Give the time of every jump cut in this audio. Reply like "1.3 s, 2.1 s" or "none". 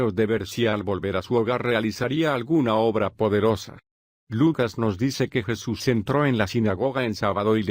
none